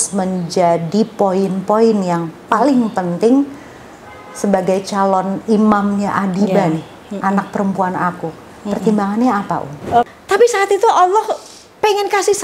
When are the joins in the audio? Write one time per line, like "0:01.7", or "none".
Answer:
0:10.1